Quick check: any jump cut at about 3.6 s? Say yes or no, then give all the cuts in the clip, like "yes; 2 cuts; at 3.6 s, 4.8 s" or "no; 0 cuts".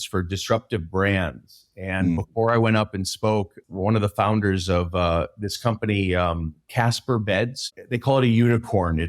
yes; 3 cuts; at 3.6 s, 6.6 s, 7.7 s